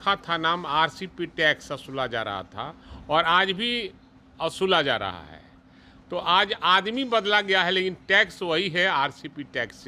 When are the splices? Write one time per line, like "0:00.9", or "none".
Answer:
none